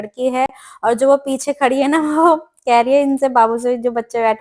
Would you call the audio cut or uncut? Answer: uncut